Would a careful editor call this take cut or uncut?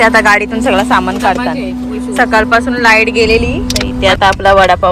cut